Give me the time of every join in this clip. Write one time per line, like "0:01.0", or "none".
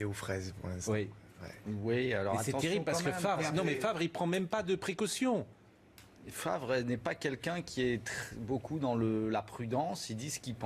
0:09.0

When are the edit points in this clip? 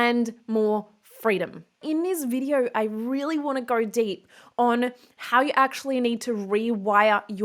0:01.8

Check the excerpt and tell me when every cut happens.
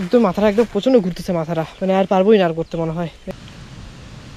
0:03.5

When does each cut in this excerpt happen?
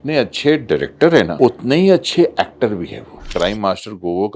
0:01.3
0:03.2

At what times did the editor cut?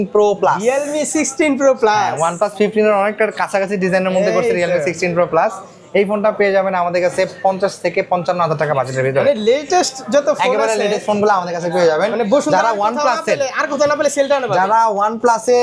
none

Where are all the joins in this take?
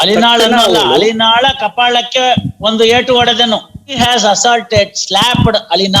0:03.9

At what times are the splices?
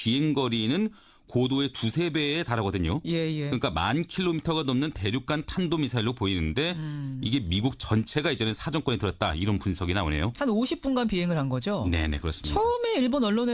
none

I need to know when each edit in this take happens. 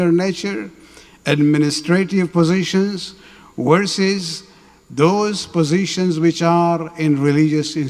none

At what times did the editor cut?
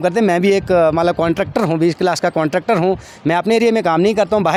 none

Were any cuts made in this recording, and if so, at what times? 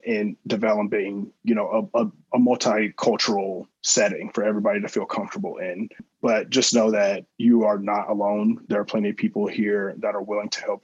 0:06.1

